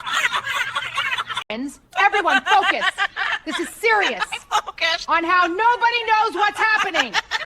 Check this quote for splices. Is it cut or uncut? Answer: cut